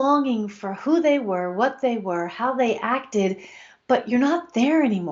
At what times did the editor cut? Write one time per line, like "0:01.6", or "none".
none